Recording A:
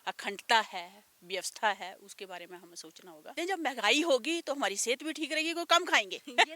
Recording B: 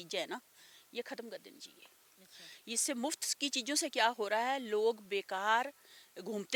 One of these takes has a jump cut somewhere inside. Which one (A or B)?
A